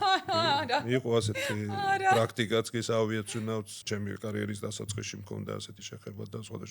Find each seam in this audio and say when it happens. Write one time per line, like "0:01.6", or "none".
0:03.7